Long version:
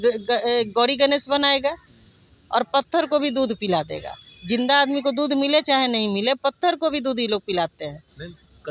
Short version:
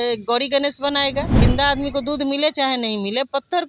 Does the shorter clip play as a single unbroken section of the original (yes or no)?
no